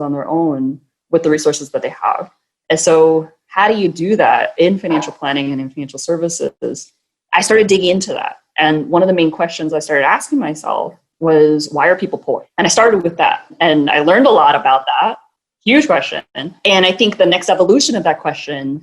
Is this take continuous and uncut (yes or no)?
no